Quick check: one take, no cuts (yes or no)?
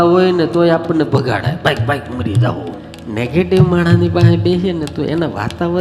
no